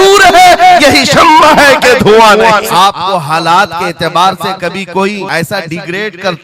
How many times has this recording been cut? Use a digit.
2